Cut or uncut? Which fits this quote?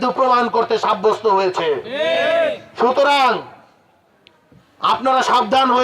uncut